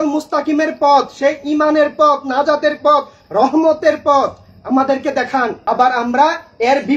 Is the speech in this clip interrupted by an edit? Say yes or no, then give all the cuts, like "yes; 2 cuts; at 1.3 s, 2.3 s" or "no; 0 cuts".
yes; 1 cut; at 5.6 s